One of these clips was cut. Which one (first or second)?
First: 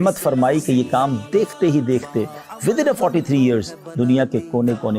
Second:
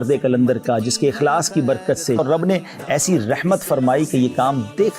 second